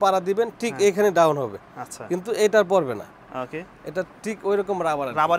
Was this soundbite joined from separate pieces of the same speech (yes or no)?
no